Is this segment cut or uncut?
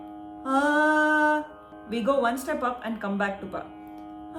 uncut